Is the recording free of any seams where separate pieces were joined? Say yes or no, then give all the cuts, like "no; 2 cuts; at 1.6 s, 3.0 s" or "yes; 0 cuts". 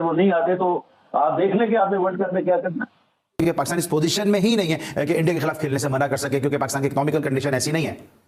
yes; 0 cuts